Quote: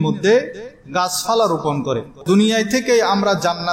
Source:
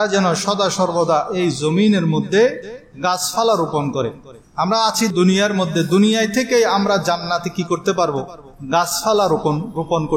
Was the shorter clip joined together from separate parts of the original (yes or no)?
yes